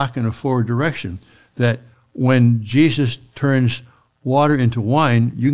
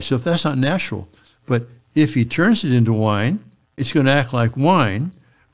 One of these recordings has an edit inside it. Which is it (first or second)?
second